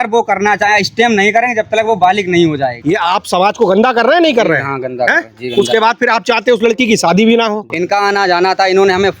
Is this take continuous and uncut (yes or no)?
no